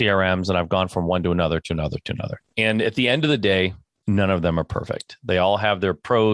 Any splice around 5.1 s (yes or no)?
no